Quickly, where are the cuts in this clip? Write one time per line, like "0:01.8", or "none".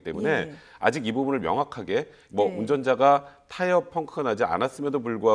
0:01.8